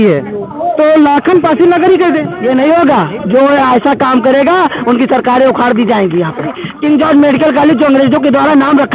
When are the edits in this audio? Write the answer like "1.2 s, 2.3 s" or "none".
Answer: 2.3 s, 6.7 s